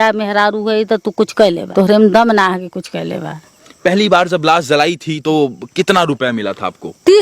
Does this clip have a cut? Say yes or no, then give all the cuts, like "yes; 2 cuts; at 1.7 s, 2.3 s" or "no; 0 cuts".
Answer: yes; 2 cuts; at 1.6 s, 3.7 s